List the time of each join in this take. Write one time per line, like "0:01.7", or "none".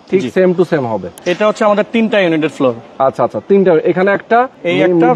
0:01.2